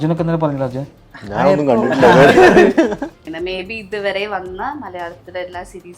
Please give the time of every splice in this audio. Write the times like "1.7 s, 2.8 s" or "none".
3.2 s